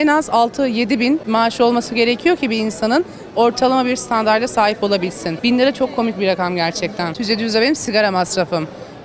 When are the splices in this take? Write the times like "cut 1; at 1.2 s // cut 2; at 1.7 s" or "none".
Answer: cut 1; at 1.2 s // cut 2; at 5.3 s // cut 3; at 7.2 s